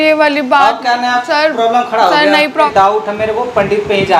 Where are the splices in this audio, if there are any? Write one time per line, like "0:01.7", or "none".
0:02.5